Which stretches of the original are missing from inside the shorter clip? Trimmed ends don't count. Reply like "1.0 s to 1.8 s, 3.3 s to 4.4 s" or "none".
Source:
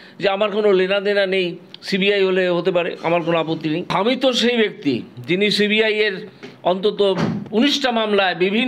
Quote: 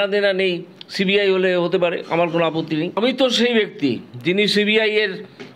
3.9 s to 4.0 s